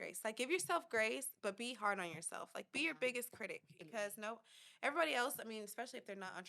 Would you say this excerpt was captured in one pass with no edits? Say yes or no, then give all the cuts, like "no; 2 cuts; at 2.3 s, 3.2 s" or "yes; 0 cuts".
no; 1 cut; at 3.7 s